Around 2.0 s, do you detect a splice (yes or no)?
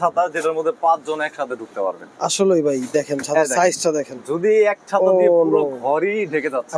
no